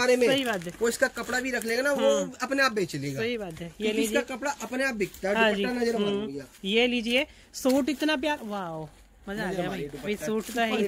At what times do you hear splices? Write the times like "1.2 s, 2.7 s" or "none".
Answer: none